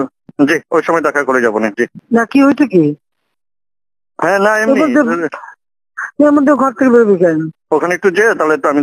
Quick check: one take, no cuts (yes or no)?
no